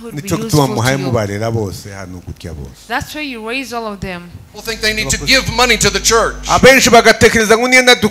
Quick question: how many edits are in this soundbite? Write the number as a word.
one